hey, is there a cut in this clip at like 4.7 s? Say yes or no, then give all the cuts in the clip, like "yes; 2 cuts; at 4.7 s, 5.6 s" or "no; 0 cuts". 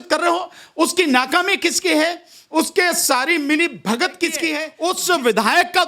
yes; 1 cut; at 4.7 s